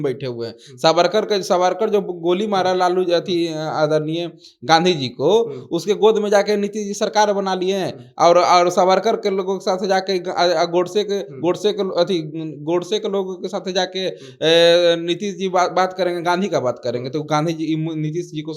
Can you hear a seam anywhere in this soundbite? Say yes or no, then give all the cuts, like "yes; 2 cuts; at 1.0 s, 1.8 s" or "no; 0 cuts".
no; 0 cuts